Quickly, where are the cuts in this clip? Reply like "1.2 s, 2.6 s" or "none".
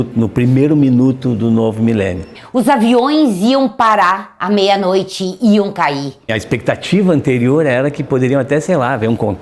2.4 s, 6.4 s